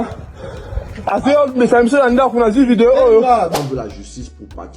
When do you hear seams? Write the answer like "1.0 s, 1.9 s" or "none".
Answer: 3.5 s